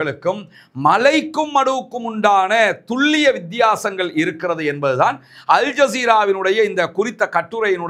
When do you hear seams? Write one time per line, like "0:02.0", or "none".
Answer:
none